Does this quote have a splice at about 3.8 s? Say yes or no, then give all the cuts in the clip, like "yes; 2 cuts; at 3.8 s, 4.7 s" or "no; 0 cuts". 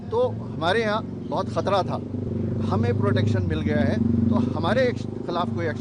no; 1 cut; at 2.3 s